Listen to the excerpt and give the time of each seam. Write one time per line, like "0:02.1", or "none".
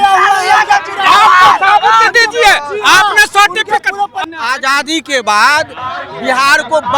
0:04.2